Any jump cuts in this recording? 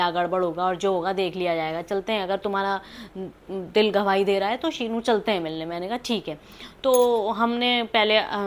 no; 0 cuts

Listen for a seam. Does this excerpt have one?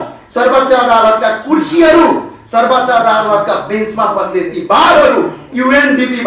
no; 0 cuts

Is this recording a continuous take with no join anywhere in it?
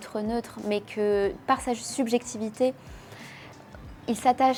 yes; 0 cuts

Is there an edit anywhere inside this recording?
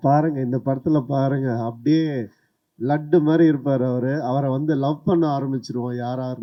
no; 0 cuts

